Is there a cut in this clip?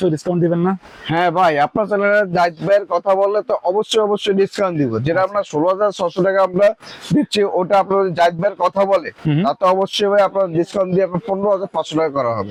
no; 0 cuts

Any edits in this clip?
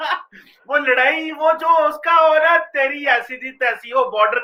no; 0 cuts

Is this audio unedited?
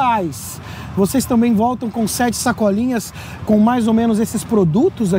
yes; 0 cuts

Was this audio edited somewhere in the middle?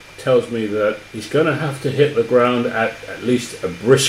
yes; 1 cut; at 1.1 s

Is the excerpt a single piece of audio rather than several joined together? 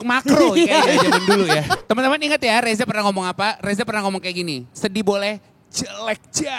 no; 1 cut; at 1.8 s

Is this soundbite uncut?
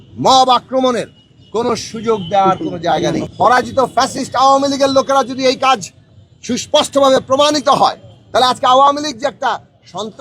no; 1 cut; at 3.3 s

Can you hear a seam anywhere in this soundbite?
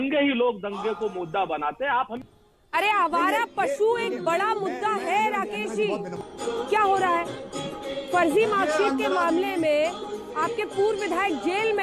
yes; 2 cuts; at 2.1 s, 6.2 s

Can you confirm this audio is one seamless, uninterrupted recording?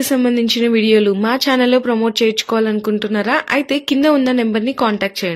yes; 0 cuts

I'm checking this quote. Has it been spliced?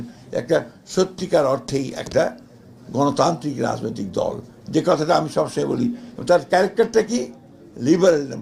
no; 0 cuts

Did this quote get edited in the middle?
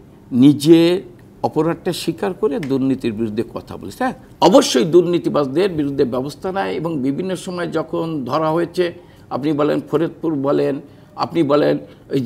yes; 1 cut; at 4.2 s

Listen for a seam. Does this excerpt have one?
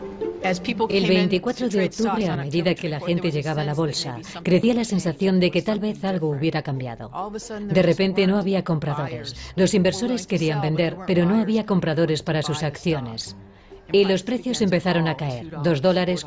no; 0 cuts

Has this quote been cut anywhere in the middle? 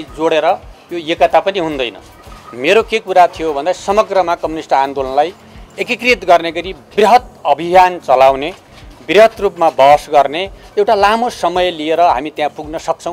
no; 0 cuts

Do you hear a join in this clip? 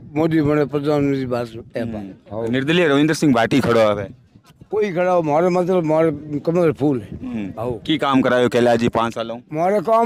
no; 0 cuts

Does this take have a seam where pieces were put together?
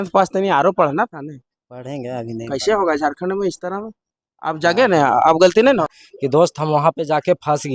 yes; 1 cut; at 5.9 s

